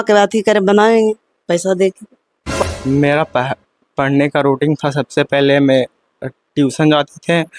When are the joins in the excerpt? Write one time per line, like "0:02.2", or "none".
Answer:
0:02.4